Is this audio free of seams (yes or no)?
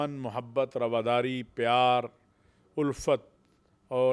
yes